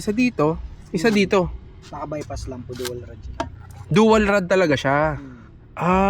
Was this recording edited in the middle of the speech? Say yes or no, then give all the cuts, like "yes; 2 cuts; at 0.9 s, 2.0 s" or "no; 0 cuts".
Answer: no; 0 cuts